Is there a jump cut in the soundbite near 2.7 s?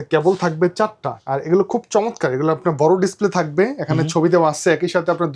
no; 1 cut; at 1.1 s

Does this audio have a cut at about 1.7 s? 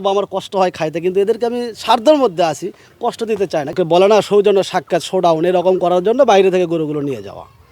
no; 1 cut; at 3.7 s

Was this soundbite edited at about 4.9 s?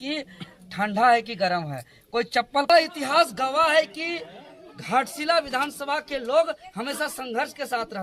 no; 1 cut; at 2.7 s

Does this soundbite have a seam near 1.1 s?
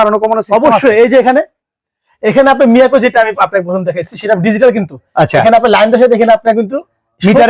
no; 0 cuts

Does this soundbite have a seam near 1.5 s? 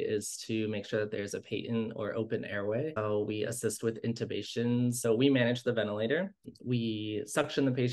no; 3 cuts; at 3.0 s, 5.1 s, 6.5 s

